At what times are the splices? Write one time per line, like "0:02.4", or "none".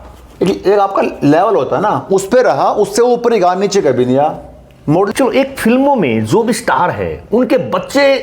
0:05.1

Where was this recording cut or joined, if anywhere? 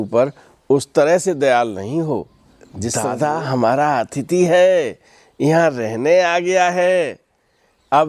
0:03.0

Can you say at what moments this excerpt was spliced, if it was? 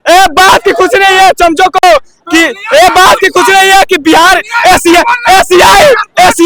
none

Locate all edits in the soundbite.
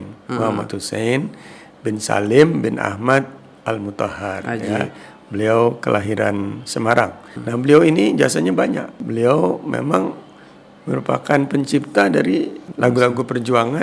0:07.4
0:09.0
0:12.6

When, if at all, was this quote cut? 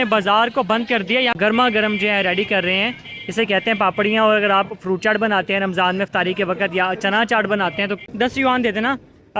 0:01.4
0:08.1

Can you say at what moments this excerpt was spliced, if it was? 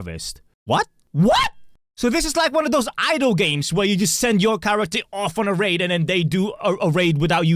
none

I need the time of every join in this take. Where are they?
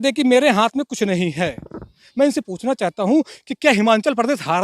none

